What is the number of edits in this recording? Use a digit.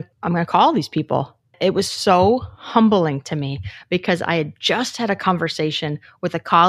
1